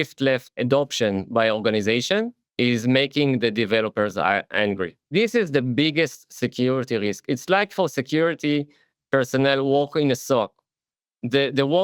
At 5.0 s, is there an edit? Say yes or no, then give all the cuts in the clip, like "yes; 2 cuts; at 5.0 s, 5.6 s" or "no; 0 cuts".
yes; 1 cut; at 5.0 s